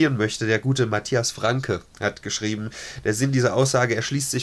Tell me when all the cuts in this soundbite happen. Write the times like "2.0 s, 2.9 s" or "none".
none